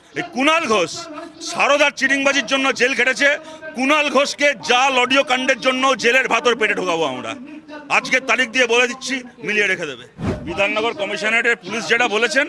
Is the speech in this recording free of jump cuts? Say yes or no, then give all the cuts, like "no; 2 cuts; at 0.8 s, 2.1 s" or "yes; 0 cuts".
yes; 0 cuts